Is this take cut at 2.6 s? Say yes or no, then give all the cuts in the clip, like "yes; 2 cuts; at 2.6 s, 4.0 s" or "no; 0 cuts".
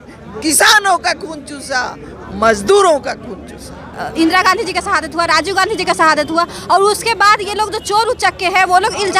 no; 1 cut; at 4.0 s